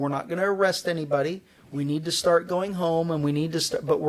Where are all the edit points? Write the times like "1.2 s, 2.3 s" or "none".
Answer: none